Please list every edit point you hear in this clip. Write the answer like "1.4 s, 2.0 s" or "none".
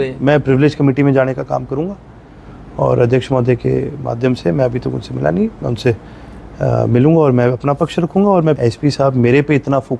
8.6 s